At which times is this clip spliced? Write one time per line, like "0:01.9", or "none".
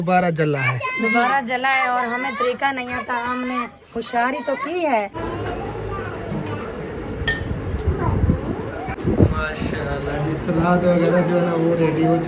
0:05.2
0:08.9